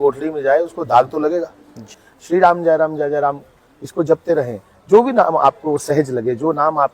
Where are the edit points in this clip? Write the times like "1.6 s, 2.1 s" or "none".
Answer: 2.1 s